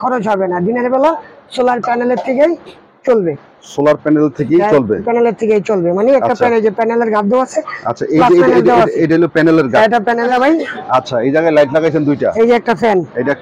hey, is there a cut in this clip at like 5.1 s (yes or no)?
no